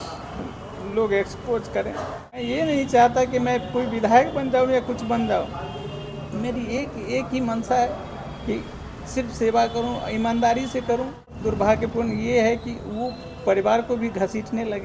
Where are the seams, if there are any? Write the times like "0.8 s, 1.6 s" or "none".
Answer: 2.4 s, 11.4 s